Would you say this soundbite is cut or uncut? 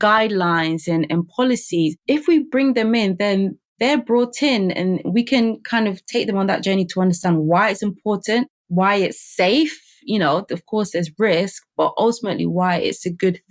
uncut